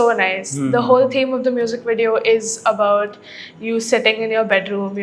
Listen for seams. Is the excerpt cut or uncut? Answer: uncut